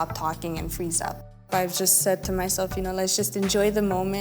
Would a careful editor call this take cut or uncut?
cut